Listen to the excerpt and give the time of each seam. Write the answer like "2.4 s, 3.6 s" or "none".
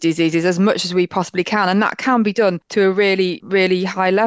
3.4 s